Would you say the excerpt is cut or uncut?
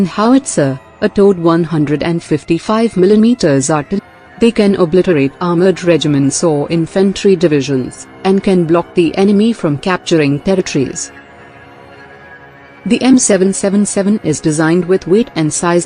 uncut